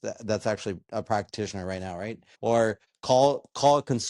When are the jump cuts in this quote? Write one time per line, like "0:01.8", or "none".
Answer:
0:02.2
0:02.9